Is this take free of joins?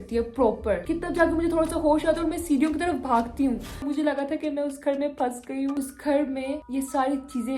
no; 3 cuts; at 0.8 s, 3.8 s, 5.8 s

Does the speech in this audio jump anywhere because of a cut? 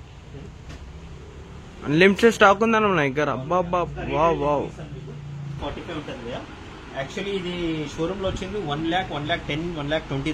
yes; 1 cut; at 5.6 s

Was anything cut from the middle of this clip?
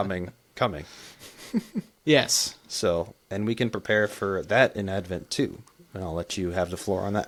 no; 0 cuts

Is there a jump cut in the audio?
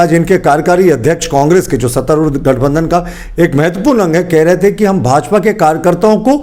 no; 0 cuts

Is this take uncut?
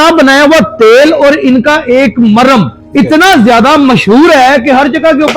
no; 1 cut; at 2.8 s

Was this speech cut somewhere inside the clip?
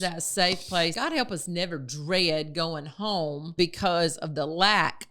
yes; 2 cuts; at 0.9 s, 3.5 s

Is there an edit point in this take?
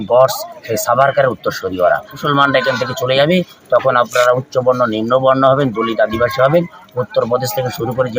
yes; 1 cut; at 2.2 s

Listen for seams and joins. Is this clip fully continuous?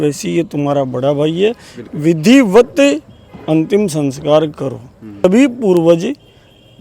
no; 1 cut; at 5.2 s

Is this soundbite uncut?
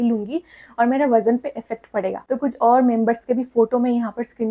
no; 1 cut; at 2.2 s

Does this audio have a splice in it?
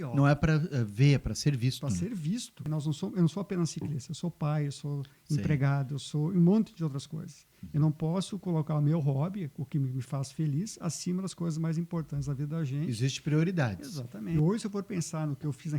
yes; 2 cuts; at 2.7 s, 14.3 s

